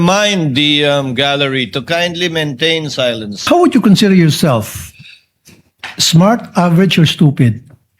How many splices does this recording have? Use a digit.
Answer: 1